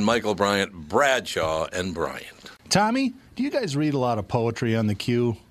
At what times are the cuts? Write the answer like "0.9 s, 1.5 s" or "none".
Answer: 2.5 s